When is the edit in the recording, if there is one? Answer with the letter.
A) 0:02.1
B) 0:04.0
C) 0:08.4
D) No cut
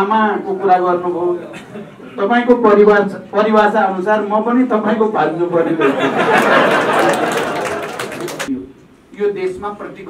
C